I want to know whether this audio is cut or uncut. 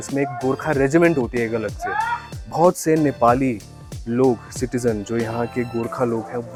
uncut